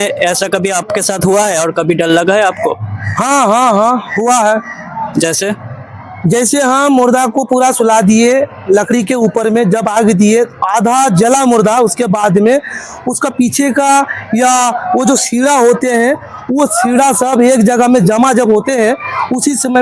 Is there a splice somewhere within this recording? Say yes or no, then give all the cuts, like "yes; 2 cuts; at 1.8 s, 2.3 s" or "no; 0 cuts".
no; 0 cuts